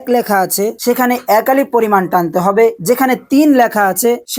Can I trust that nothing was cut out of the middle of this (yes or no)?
yes